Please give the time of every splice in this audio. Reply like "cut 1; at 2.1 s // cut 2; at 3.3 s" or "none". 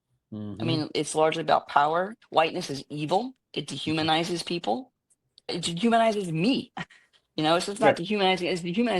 cut 1; at 2.2 s // cut 2; at 5.5 s

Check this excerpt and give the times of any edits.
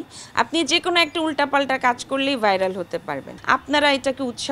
cut 1; at 3.3 s

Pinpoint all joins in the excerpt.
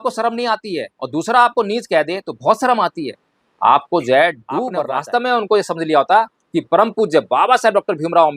cut 1; at 4.8 s

